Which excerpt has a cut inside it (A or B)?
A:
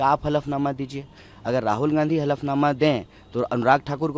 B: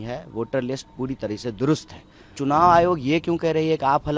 B